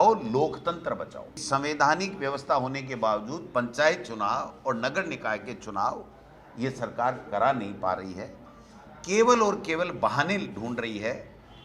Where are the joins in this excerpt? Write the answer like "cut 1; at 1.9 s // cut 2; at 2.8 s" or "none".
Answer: cut 1; at 1.4 s